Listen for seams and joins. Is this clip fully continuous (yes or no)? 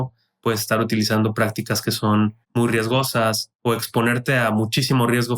no